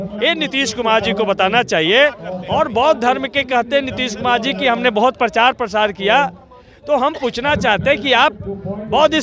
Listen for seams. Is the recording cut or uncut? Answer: uncut